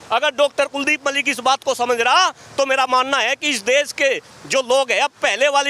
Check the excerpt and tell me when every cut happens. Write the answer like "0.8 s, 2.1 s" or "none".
none